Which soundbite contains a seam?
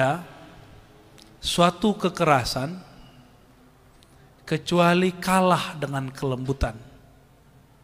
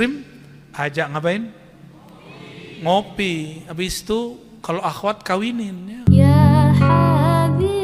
second; 1 cut; at 5.9 s

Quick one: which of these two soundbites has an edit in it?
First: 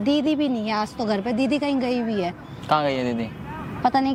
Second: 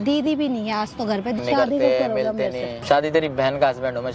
second; 2 cuts; at 1.4 s, 2.7 s

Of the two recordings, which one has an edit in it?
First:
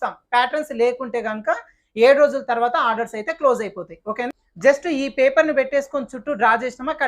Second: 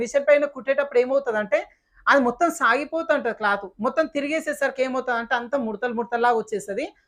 first; 1 cut; at 4.4 s

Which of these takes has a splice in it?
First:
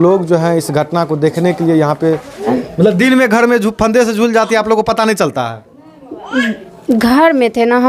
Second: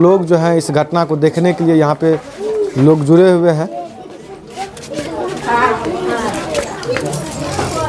first; 1 cut; at 2.5 s

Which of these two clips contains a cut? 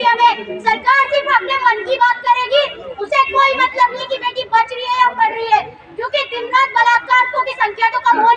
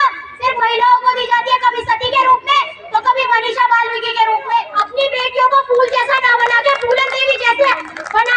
second; 1 cut; at 4.8 s

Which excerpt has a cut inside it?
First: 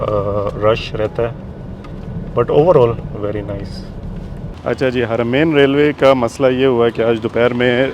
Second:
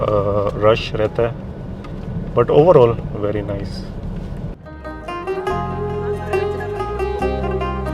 first; 1 cut; at 4.5 s

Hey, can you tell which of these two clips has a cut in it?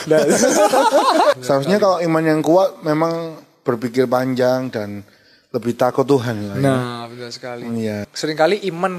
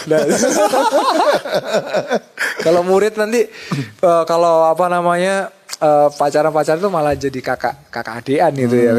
first; 2 cuts; at 1.4 s, 8.1 s

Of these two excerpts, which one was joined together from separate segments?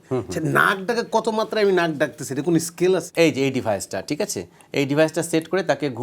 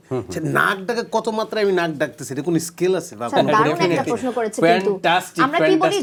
first; 1 cut; at 3.1 s

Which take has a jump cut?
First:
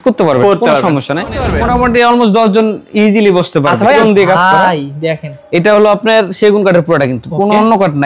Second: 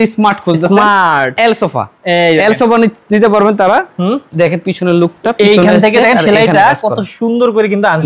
first; 2 cuts; at 1.5 s, 4.0 s

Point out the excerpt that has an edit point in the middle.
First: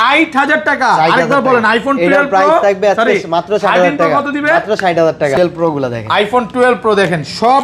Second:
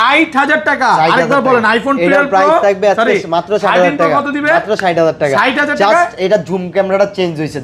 first; 1 cut; at 5.4 s

